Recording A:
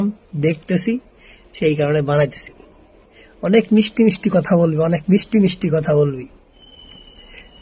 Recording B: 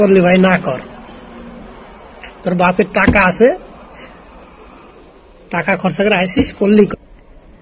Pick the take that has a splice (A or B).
B